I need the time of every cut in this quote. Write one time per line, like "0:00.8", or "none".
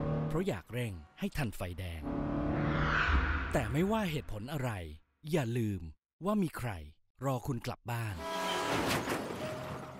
none